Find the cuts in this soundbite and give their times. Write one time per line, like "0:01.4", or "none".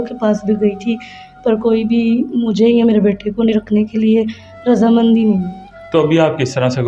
none